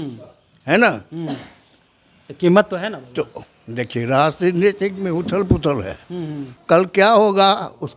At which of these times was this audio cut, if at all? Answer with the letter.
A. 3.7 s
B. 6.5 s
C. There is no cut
B